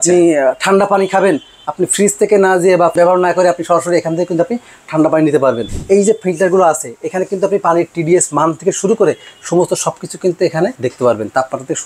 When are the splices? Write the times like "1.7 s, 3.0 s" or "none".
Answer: 2.9 s, 5.7 s, 10.8 s